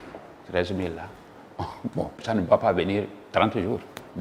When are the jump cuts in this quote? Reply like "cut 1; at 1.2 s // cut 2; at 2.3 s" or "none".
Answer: cut 1; at 2.2 s

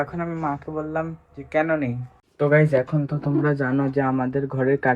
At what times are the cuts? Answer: cut 1; at 2.1 s

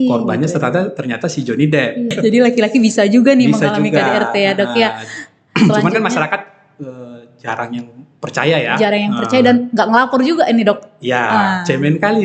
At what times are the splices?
cut 1; at 2.1 s

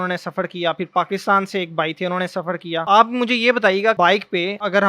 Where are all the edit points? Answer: cut 1; at 2.8 s // cut 2; at 4.0 s

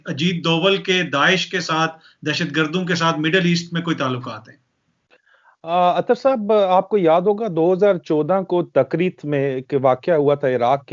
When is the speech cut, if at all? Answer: none

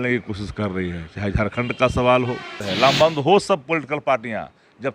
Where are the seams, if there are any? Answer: cut 1; at 2.6 s

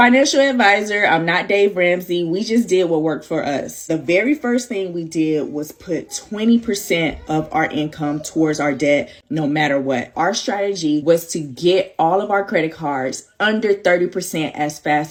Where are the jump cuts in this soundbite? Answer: none

